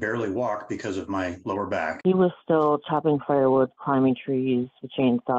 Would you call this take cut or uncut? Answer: cut